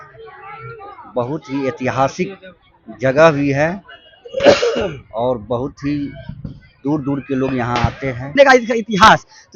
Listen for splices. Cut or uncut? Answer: cut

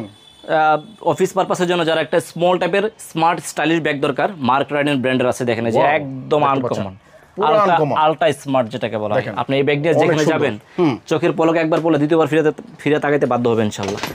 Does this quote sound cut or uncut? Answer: uncut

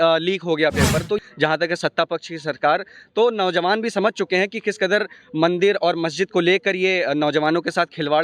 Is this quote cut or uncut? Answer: cut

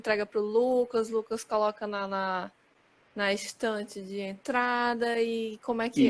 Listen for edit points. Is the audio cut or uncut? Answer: uncut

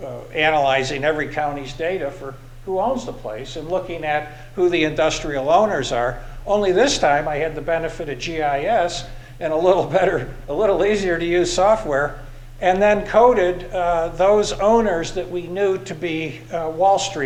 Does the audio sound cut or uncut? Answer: uncut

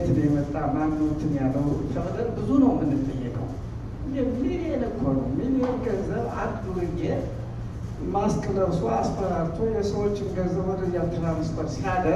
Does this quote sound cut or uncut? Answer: uncut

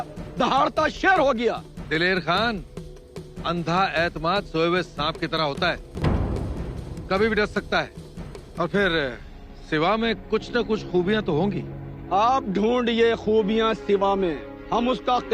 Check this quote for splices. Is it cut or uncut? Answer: cut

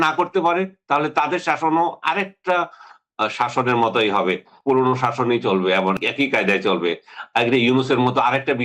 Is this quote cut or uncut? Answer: cut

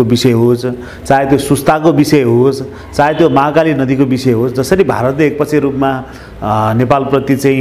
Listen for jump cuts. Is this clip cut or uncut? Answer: uncut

